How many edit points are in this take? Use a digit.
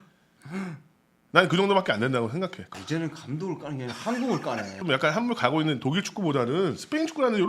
2